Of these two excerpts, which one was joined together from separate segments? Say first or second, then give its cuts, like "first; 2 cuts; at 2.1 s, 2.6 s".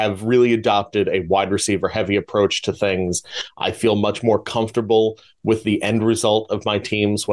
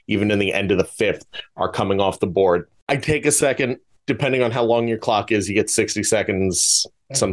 second; 2 cuts; at 2.7 s, 3.9 s